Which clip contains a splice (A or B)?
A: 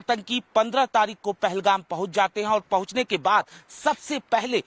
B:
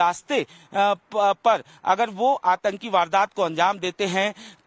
A